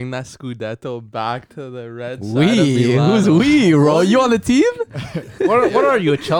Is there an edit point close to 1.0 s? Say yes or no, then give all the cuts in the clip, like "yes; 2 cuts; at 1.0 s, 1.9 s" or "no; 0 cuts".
no; 0 cuts